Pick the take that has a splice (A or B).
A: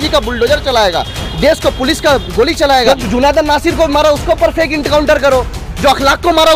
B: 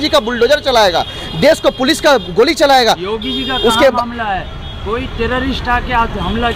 A